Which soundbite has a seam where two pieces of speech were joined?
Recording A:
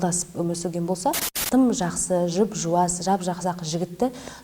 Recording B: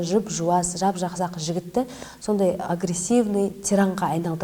A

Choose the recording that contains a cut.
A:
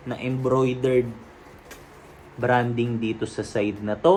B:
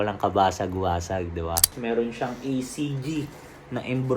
B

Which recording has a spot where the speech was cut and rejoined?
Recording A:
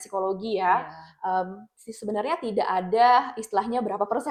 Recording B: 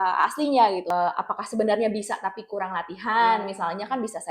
B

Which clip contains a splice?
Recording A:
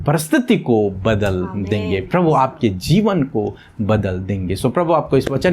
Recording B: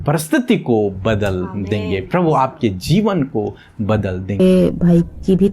B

